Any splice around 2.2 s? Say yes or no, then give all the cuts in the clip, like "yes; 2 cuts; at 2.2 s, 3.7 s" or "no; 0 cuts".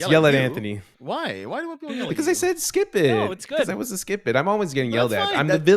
no; 1 cut; at 0.9 s